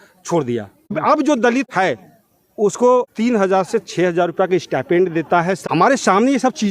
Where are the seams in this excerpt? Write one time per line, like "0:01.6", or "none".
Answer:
0:01.0
0:01.7
0:03.1
0:05.6